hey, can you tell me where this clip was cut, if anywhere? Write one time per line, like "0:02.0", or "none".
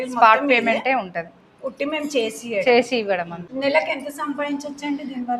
none